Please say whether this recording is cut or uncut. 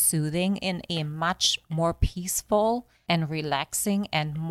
cut